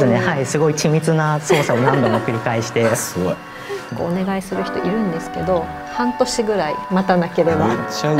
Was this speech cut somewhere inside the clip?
yes; 1 cut; at 3.9 s

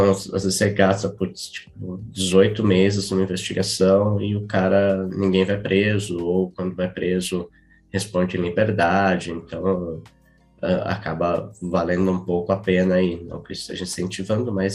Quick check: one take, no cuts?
yes; 0 cuts

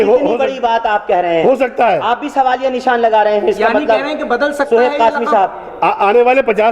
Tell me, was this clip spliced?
no; 0 cuts

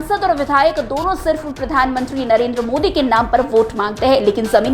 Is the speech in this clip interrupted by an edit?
no; 0 cuts

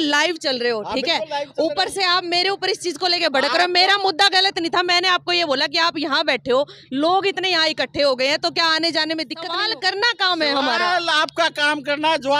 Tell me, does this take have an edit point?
yes; 1 cut; at 9.4 s

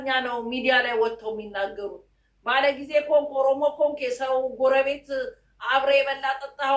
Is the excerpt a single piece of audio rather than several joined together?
yes; 0 cuts

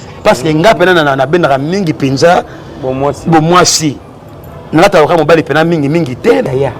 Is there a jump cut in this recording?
yes; 1 cut; at 0.9 s

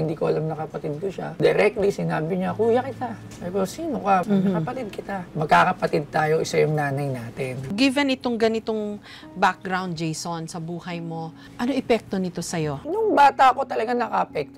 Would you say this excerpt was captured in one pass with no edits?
no; 1 cut; at 7.6 s

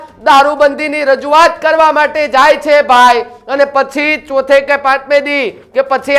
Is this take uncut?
yes; 0 cuts

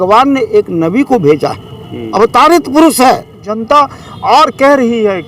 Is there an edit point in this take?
yes; 1 cut; at 3.5 s

